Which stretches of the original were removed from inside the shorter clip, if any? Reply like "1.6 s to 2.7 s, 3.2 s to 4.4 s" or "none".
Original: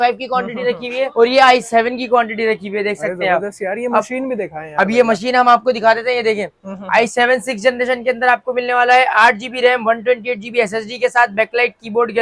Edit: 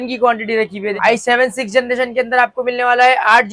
2.8 s to 6.8 s